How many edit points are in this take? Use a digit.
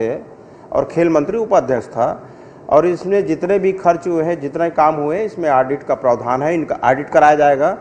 0